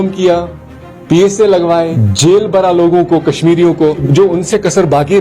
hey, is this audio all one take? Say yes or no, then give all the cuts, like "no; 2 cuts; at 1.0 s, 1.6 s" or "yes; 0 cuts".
no; 2 cuts; at 2.0 s, 4.0 s